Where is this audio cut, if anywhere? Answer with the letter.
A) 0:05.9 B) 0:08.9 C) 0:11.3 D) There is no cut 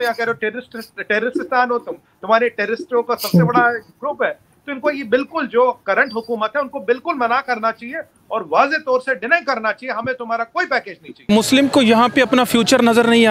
C